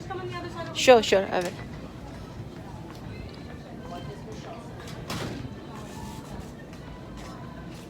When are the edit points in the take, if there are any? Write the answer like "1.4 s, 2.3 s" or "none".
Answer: none